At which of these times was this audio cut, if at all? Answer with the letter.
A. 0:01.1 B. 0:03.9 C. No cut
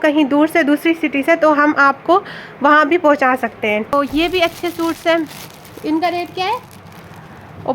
B